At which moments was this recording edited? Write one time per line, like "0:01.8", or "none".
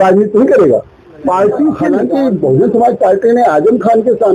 0:02.0